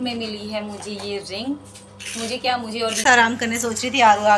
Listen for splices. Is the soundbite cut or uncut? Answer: cut